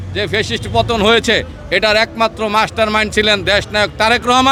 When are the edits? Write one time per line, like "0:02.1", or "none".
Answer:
none